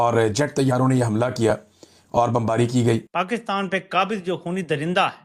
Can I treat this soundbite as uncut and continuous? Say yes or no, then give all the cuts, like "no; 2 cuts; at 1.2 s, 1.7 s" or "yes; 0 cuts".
no; 1 cut; at 3.2 s